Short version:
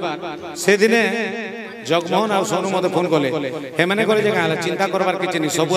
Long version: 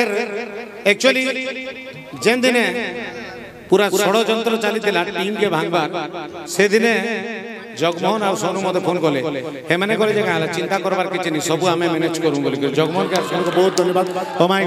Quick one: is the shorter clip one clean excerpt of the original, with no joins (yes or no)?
yes